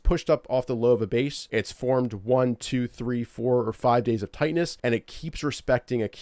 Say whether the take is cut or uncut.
cut